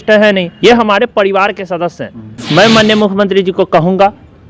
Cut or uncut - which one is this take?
cut